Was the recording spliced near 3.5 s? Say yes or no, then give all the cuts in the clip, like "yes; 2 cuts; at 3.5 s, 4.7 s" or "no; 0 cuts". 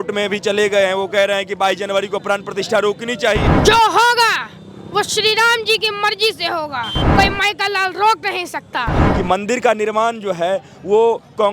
yes; 3 cuts; at 3.5 s, 7.0 s, 9.0 s